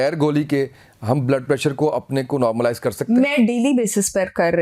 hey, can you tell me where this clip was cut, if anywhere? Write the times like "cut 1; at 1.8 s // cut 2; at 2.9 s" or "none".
none